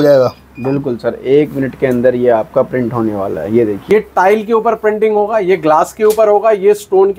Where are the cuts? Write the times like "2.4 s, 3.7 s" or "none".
3.8 s